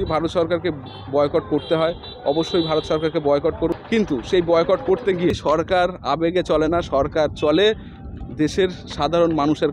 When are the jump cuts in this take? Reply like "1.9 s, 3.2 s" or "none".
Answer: 3.8 s, 5.3 s